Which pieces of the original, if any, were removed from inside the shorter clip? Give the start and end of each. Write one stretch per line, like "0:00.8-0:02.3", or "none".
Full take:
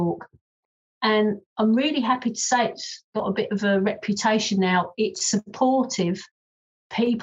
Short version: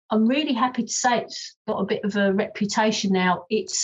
none